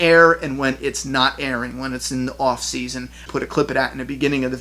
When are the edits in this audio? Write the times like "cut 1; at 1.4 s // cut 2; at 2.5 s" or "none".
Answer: cut 1; at 3.2 s